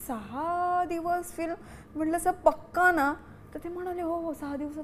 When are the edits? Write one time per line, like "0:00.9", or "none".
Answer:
none